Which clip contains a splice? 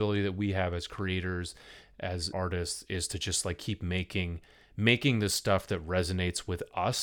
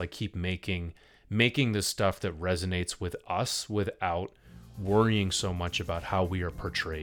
first; 1 cut; at 2.3 s

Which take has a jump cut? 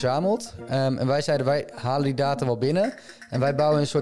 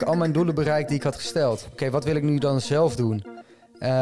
second; 1 cut; at 1.8 s

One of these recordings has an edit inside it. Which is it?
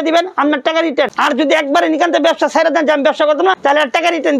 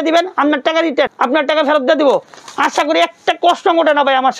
first; 2 cuts; at 1.1 s, 3.6 s

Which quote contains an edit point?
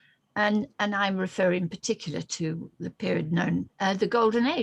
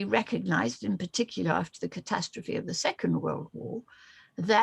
first; 1 cut; at 3.7 s

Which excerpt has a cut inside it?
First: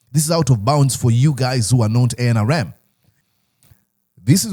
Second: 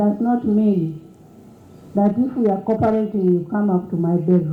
first; 1 cut; at 3.1 s

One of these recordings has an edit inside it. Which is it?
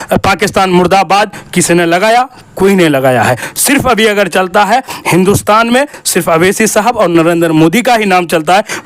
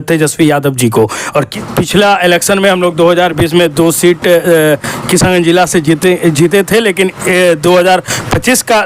second; 1 cut; at 1.5 s

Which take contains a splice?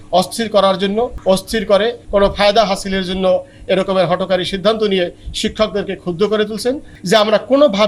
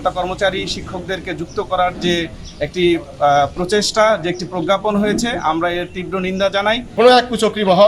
second; 1 cut; at 6.9 s

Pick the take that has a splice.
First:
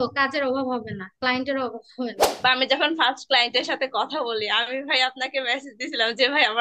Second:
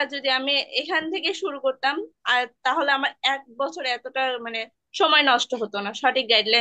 first; 1 cut; at 2.3 s

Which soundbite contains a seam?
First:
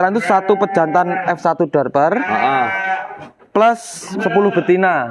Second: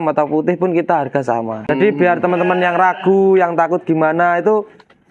second; 1 cut; at 1.6 s

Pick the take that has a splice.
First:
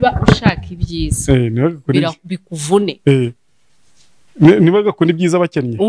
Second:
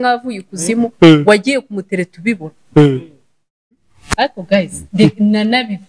second; 1 cut; at 3.6 s

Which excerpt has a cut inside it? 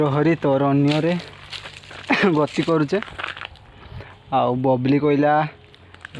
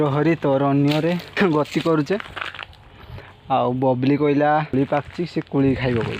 second; 2 cuts; at 1.4 s, 4.7 s

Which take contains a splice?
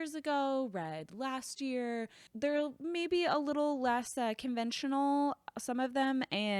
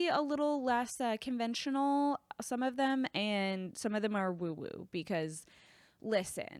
first; 1 cut; at 2.2 s

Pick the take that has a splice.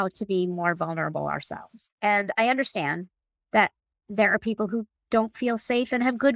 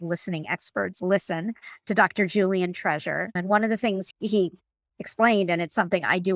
second; 3 cuts; at 1.0 s, 3.3 s, 4.1 s

